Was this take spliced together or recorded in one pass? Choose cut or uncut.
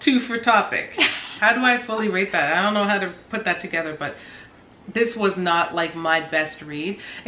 uncut